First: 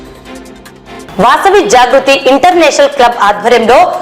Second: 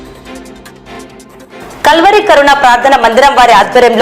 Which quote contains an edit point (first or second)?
second